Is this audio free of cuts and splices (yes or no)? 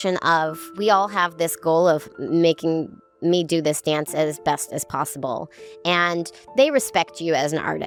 yes